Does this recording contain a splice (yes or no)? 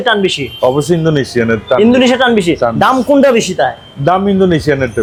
no